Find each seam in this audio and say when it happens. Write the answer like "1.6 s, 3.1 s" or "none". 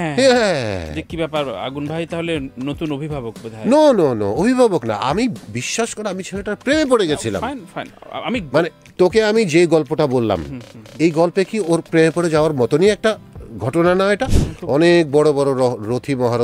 14.5 s